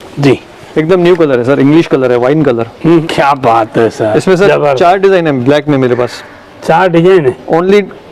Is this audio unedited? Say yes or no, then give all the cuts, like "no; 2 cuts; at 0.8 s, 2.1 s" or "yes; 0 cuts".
no; 1 cut; at 3.0 s